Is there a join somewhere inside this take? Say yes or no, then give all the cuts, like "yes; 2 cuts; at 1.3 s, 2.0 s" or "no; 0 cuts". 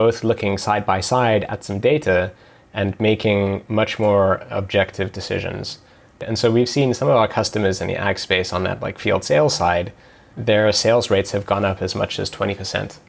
yes; 1 cut; at 6.2 s